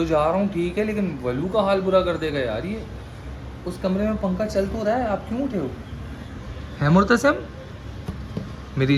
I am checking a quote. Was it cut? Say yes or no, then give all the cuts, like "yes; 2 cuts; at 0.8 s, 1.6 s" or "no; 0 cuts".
no; 0 cuts